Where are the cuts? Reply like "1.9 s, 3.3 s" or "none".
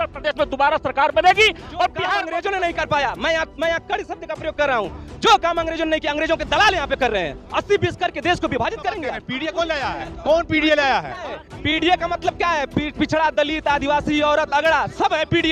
2.2 s, 9.3 s

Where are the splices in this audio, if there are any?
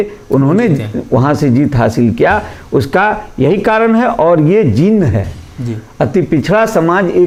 none

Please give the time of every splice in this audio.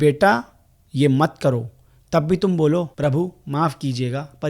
2.9 s

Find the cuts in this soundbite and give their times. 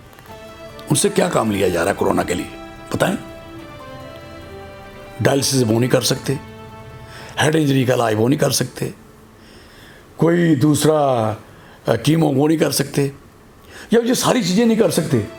none

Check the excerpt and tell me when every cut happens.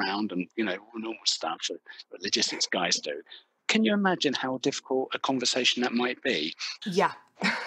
6.7 s

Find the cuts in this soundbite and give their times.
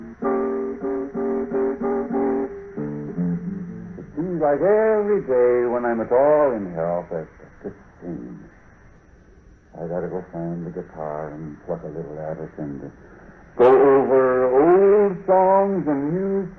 6.7 s

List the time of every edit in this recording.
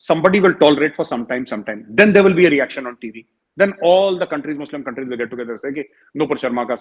none

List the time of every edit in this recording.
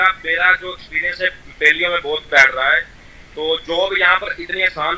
none

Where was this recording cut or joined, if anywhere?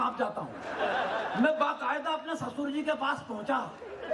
0.9 s

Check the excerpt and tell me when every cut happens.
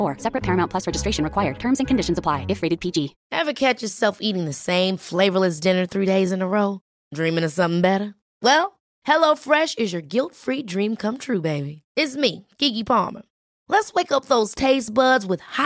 3.2 s

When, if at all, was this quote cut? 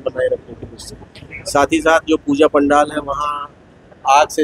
none

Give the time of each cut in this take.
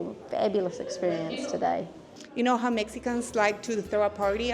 2.0 s

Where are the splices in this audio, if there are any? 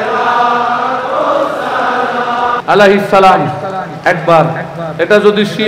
2.6 s

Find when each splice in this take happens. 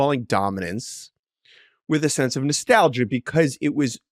none

